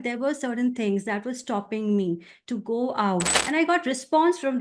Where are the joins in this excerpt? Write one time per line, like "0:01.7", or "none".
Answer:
0:03.4